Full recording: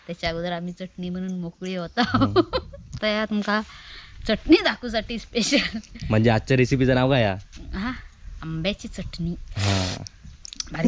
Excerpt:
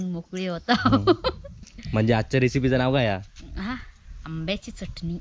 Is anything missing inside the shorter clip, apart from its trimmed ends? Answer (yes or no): yes